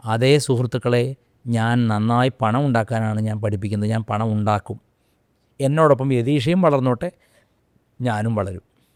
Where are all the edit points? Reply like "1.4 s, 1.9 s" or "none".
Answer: none